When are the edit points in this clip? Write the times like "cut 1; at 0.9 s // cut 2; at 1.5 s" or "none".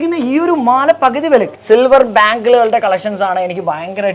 cut 1; at 1.6 s